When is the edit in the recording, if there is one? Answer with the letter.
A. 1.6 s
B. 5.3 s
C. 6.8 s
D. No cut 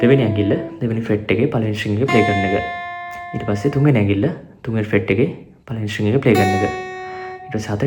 D